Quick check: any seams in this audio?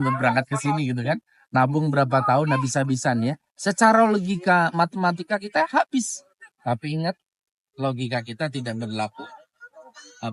no; 0 cuts

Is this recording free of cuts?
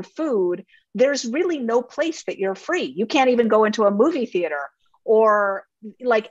yes; 0 cuts

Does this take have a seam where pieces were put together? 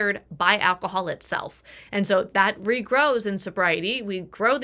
no; 0 cuts

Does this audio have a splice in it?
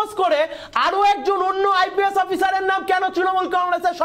no; 0 cuts

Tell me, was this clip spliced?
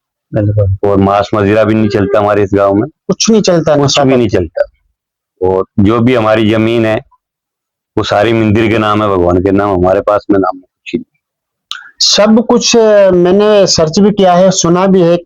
no; 0 cuts

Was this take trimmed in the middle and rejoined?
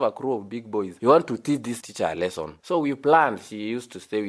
yes; 2 cuts; at 0.9 s, 1.8 s

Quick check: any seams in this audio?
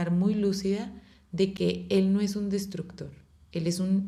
no; 0 cuts

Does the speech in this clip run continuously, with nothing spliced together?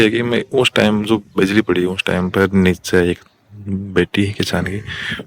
yes; 0 cuts

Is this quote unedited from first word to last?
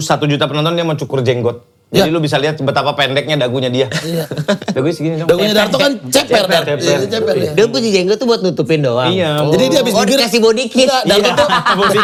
yes; 0 cuts

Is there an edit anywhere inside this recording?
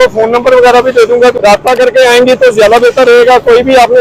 yes; 1 cut; at 1.4 s

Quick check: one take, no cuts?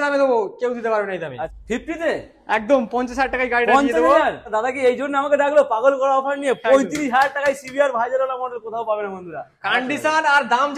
no; 3 cuts; at 1.5 s, 4.5 s, 9.5 s

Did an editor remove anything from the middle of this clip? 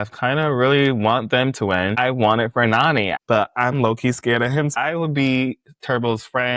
yes; 3 cuts; at 2.0 s, 3.1 s, 4.7 s

